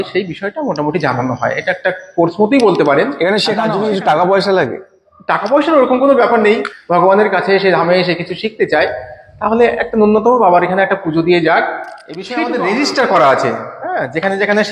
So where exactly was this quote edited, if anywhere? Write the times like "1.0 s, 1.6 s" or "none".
3.6 s, 6.7 s, 12.4 s